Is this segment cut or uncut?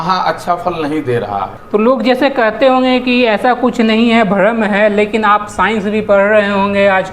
cut